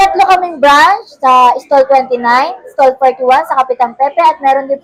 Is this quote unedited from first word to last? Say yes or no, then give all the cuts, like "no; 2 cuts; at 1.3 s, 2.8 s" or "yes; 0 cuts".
yes; 0 cuts